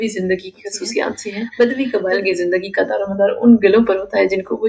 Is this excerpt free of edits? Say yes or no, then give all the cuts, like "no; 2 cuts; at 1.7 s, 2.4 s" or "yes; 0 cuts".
no; 1 cut; at 1.4 s